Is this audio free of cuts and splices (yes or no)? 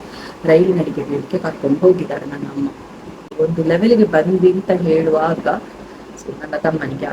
no